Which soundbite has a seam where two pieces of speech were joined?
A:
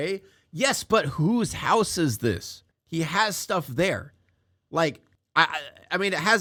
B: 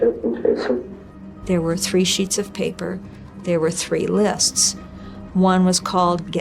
B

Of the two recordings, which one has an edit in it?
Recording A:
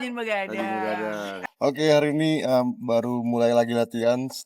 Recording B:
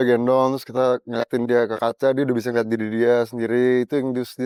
A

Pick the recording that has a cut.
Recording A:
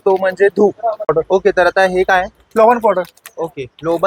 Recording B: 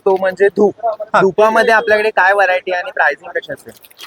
A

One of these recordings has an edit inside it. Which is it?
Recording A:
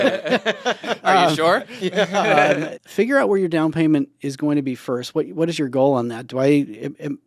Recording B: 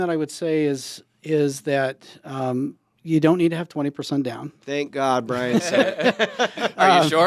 A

